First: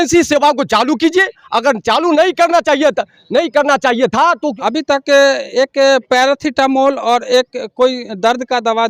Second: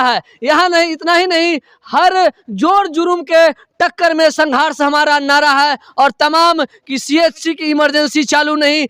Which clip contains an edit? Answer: first; 1 cut; at 4.6 s

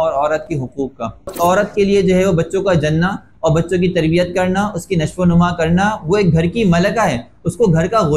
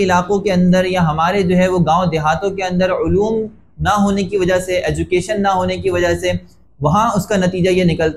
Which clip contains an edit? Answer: first; 1 cut; at 1.3 s

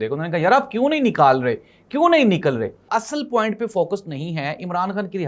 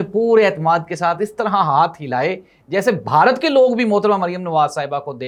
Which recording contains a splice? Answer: first; 1 cut; at 2.9 s

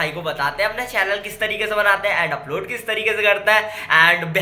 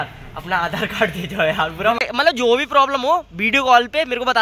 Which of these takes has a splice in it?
second; 1 cut; at 2.0 s

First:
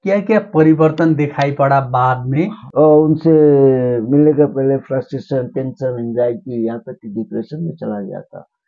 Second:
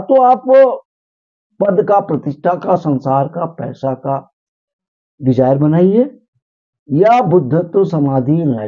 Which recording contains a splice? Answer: first; 1 cut; at 2.6 s

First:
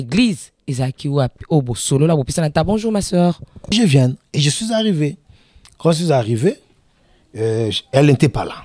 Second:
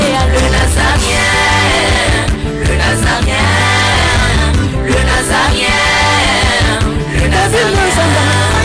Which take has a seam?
first; 1 cut; at 3.7 s

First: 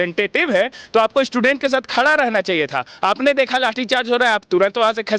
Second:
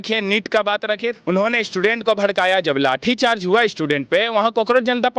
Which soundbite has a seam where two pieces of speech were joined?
second; 1 cut; at 1.1 s

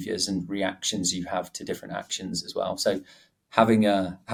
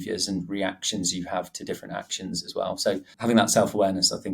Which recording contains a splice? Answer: second; 1 cut; at 3.1 s

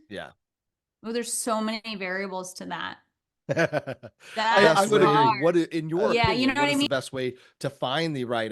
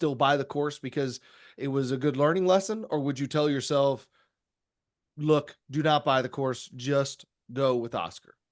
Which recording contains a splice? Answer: first; 1 cut; at 6.9 s

